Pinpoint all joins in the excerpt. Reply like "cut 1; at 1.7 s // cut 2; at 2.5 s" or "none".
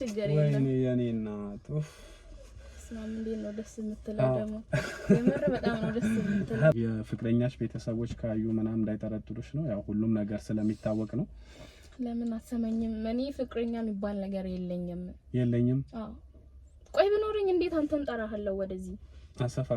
cut 1; at 6.7 s